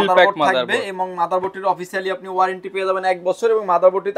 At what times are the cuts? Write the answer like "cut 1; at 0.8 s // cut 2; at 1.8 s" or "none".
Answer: none